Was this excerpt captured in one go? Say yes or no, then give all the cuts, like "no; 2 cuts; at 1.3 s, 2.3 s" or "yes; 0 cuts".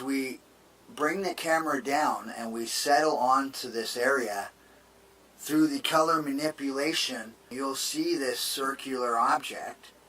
no; 1 cut; at 6.0 s